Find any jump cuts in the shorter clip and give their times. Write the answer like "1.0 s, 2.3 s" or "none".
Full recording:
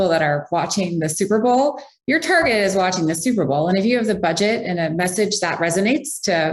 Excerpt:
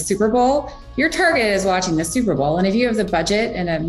none